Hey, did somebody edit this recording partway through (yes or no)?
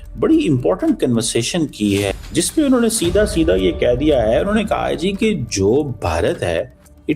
yes